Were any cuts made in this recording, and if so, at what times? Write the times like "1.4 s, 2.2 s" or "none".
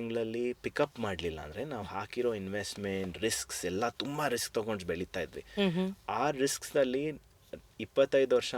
none